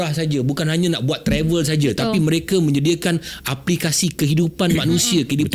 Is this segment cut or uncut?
uncut